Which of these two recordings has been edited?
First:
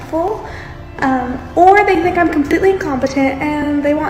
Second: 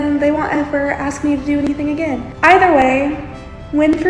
second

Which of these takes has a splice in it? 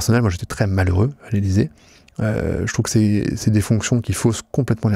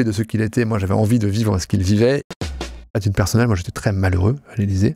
second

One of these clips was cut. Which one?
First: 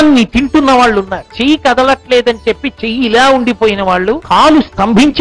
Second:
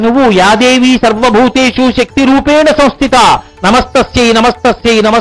first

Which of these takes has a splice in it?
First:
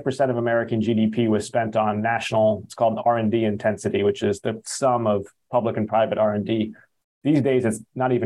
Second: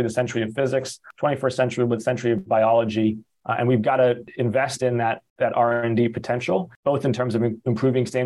second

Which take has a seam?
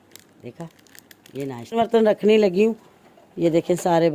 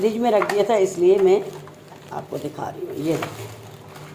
first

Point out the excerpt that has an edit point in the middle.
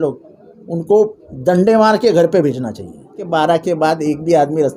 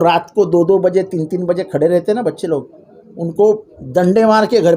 first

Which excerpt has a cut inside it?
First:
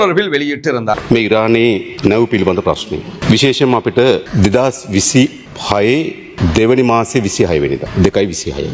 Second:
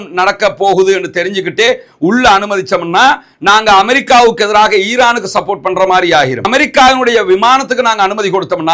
first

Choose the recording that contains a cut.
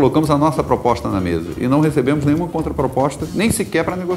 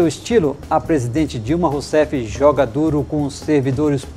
first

